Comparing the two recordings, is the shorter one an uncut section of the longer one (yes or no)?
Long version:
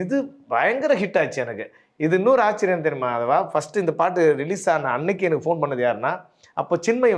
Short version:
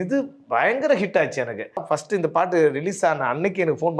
no